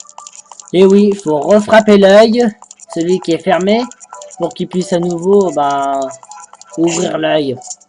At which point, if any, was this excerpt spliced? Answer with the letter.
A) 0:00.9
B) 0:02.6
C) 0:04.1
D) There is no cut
D